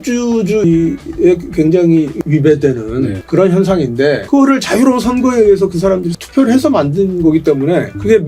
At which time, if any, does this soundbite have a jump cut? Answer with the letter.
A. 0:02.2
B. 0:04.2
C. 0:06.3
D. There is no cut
A